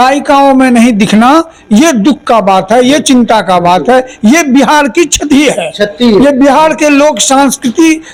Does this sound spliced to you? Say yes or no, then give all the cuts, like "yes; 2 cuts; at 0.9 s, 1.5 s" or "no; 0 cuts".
no; 0 cuts